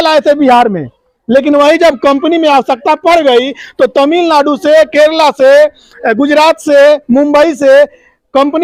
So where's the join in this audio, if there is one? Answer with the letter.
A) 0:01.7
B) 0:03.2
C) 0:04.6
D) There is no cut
D